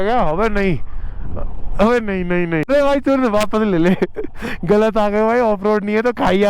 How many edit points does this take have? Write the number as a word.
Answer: one